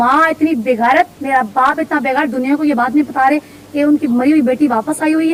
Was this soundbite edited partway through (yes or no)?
no